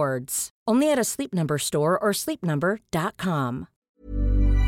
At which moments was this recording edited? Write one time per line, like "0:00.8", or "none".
0:03.7